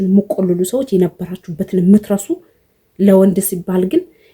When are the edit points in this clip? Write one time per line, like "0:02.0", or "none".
none